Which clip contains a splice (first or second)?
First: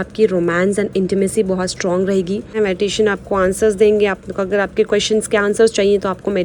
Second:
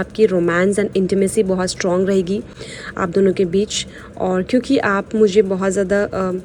first